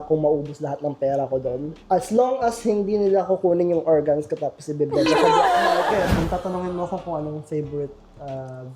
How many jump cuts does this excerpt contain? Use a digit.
2